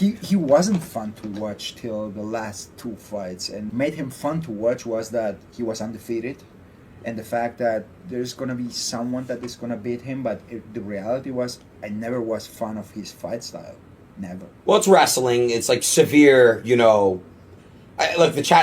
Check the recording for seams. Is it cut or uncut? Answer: cut